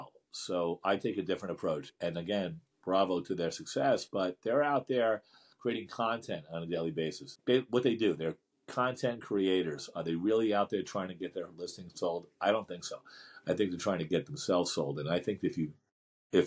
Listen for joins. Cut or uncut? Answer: cut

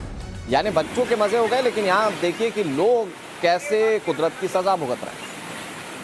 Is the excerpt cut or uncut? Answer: cut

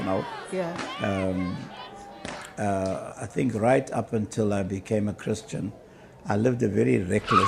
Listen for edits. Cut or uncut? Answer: uncut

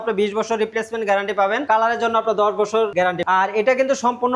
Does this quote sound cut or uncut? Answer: cut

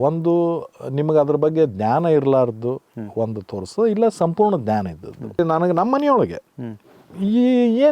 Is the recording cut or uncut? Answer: cut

